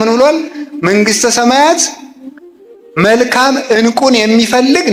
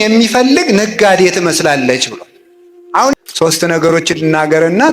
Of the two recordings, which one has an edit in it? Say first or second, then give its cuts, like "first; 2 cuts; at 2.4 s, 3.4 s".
second; 1 cut; at 3.1 s